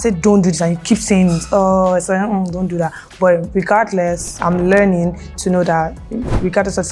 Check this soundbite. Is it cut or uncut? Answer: cut